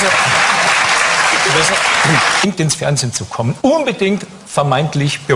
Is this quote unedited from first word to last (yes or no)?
yes